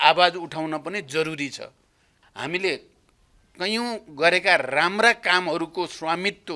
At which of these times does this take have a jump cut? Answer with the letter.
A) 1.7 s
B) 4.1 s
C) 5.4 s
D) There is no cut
D